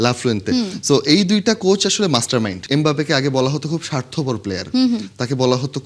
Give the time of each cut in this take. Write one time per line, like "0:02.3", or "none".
0:02.6